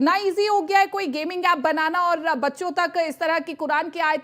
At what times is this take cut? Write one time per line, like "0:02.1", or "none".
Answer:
none